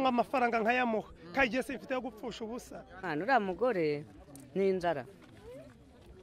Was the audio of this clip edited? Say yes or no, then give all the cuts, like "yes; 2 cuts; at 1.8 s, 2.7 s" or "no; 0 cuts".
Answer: yes; 1 cut; at 2.9 s